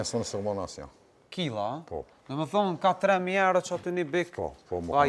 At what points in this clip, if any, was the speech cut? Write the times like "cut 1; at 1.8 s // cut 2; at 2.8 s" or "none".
none

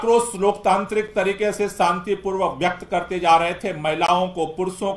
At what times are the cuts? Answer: none

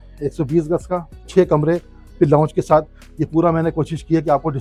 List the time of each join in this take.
none

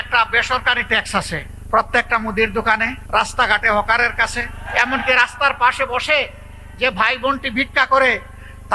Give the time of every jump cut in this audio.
cut 1; at 1.5 s // cut 2; at 3.0 s // cut 3; at 4.6 s

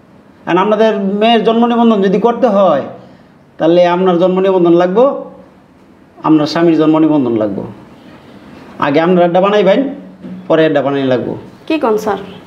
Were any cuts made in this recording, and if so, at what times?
none

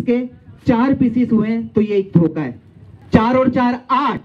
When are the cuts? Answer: cut 1; at 2.9 s

